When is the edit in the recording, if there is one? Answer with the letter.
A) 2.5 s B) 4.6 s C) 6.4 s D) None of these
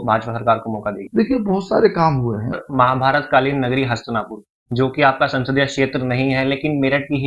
A